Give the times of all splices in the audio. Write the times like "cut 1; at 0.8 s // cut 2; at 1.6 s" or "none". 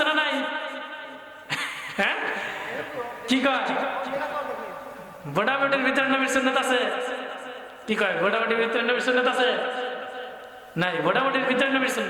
none